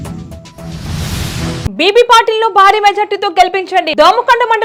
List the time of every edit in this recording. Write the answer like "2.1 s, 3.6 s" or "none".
none